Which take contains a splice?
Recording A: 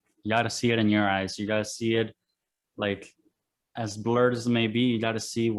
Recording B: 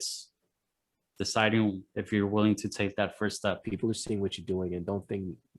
B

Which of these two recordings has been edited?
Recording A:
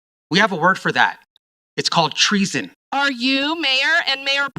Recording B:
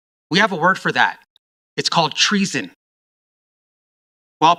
A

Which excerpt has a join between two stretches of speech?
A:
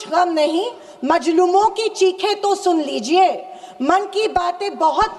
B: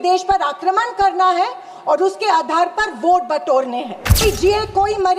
B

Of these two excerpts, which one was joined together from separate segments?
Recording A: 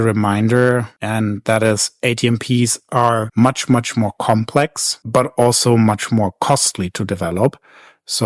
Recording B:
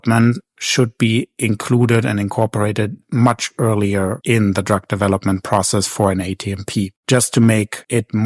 B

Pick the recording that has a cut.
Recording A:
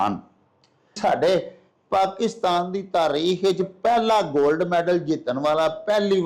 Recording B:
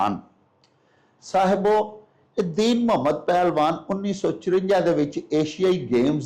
A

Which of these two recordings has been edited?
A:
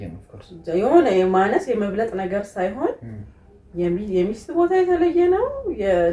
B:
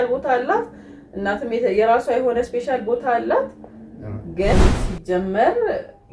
B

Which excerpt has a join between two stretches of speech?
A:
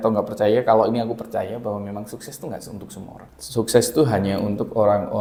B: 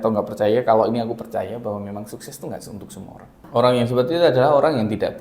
B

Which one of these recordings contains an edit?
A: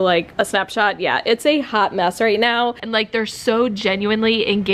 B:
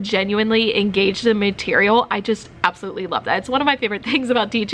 A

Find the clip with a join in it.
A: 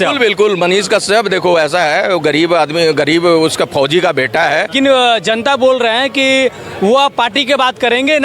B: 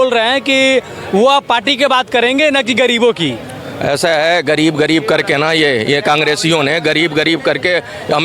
A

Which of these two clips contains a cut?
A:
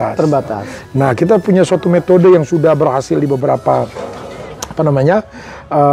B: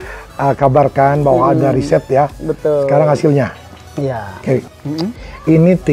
B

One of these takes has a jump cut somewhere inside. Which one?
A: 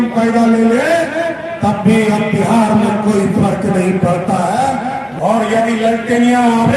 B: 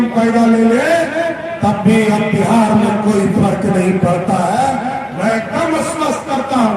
A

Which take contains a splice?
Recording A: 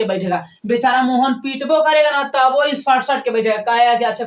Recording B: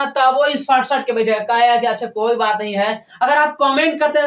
B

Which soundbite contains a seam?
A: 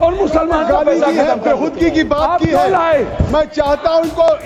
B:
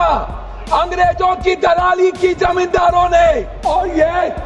B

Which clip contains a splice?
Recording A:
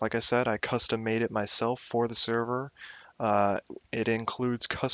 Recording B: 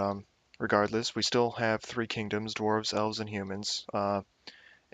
B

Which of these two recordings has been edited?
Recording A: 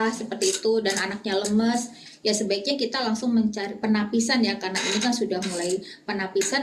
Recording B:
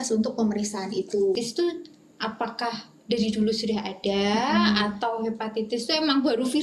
B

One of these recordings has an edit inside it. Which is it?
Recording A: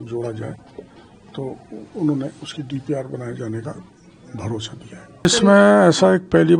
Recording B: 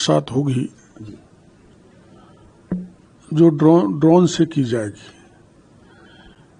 A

